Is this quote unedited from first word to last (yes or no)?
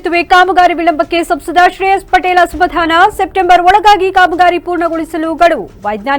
yes